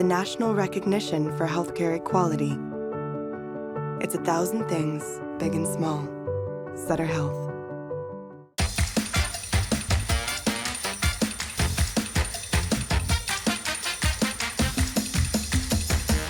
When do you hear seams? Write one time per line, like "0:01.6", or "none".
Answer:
none